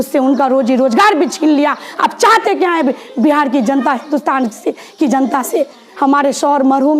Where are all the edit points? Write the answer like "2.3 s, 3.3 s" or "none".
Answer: 5.9 s